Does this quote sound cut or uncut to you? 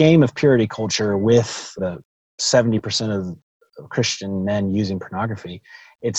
cut